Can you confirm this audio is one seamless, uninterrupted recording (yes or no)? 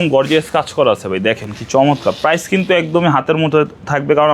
yes